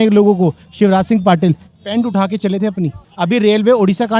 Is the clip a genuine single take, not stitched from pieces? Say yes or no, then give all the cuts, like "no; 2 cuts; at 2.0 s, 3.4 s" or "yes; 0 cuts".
no; 1 cut; at 3.0 s